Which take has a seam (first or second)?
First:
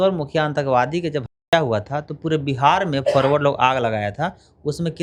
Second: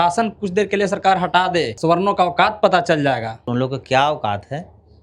second